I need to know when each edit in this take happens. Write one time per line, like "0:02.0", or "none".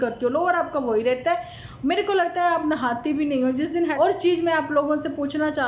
0:03.9